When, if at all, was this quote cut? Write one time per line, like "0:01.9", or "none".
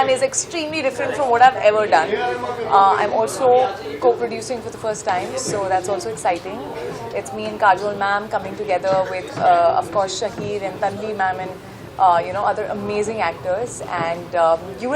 none